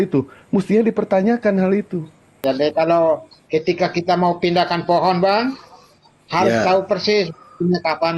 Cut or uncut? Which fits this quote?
cut